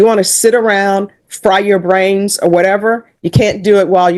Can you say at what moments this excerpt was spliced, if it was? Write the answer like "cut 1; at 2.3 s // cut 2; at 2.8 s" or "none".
none